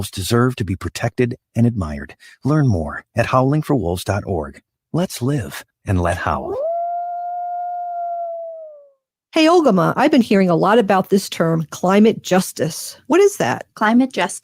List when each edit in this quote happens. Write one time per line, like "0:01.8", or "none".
0:09.2